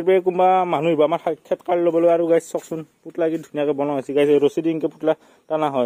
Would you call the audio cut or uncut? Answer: uncut